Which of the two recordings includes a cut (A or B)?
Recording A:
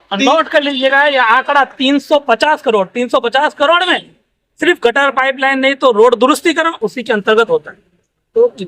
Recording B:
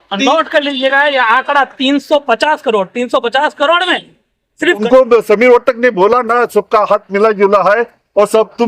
B